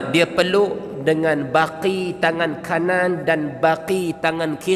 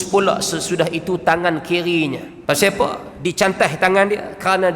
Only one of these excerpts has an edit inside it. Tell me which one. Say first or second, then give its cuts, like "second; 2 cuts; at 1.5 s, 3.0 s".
second; 2 cuts; at 2.3 s, 3.1 s